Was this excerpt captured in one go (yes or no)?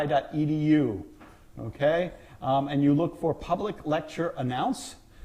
yes